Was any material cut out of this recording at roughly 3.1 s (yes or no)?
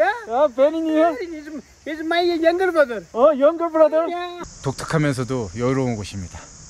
no